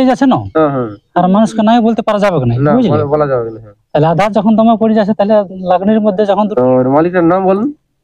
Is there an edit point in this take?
yes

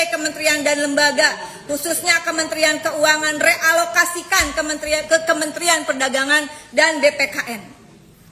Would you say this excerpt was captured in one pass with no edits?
yes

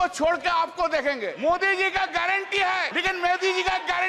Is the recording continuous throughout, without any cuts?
no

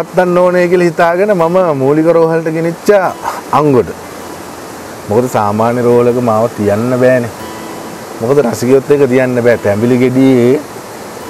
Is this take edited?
no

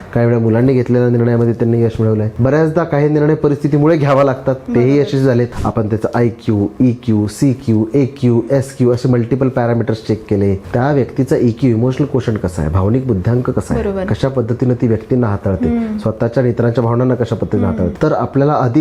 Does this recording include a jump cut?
yes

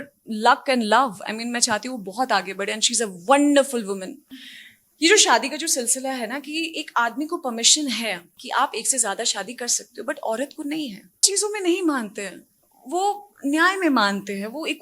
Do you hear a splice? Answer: yes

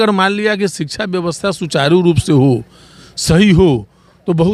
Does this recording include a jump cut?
no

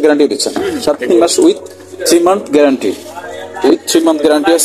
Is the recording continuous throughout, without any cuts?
yes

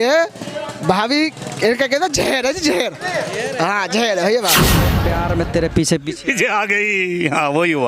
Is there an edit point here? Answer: yes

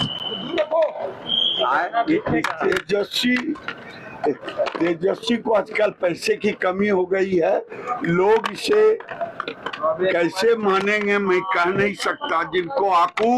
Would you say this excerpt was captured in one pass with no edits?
yes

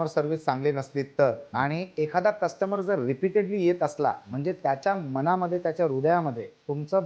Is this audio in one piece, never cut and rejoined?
yes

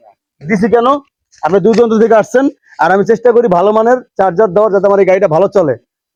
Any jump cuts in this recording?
no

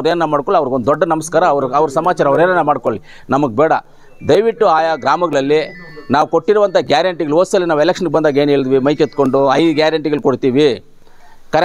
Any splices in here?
no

